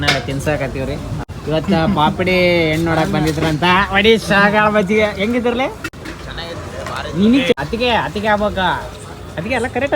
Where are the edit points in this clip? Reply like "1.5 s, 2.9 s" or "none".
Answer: 1.2 s, 7.6 s